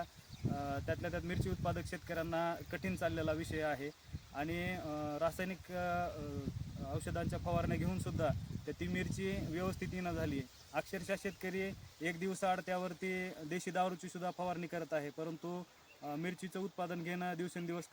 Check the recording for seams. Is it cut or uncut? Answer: uncut